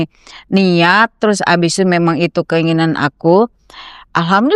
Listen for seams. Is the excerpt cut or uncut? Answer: uncut